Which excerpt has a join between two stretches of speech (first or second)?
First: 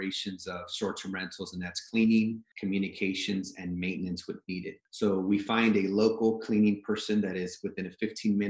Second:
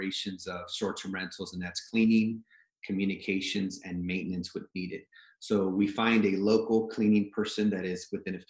first